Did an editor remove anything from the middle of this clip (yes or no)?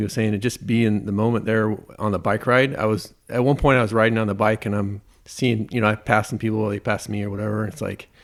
no